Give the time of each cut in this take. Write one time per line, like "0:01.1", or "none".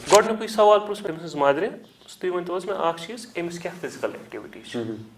0:01.0